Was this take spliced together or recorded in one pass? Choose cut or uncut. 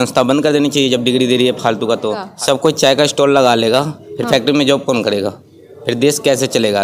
cut